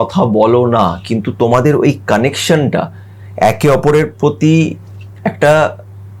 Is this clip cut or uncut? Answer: uncut